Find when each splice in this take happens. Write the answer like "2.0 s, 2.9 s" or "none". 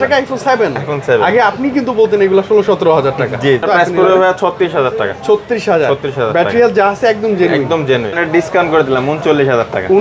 3.6 s, 8.2 s